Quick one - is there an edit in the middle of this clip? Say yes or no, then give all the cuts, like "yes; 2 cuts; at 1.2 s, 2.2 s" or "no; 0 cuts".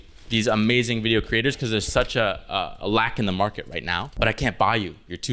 yes; 1 cut; at 4.1 s